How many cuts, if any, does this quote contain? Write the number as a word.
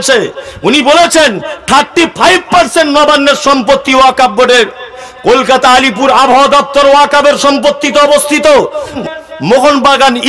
two